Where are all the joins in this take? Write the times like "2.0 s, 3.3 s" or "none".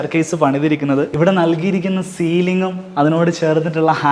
1.1 s